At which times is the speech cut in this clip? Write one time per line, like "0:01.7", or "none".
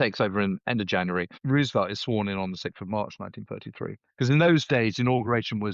0:01.3